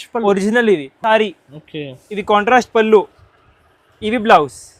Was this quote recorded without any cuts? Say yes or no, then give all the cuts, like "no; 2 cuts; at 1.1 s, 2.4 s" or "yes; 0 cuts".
no; 1 cut; at 0.9 s